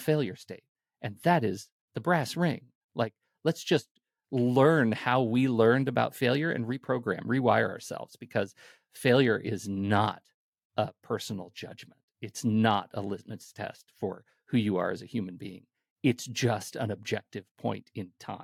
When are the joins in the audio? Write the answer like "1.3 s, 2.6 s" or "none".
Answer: none